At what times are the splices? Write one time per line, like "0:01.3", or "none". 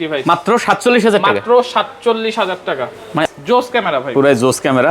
0:03.2